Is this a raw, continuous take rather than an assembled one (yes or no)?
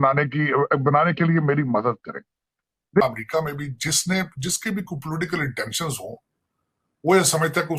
no